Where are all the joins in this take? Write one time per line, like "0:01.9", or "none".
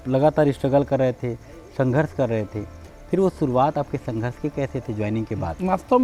none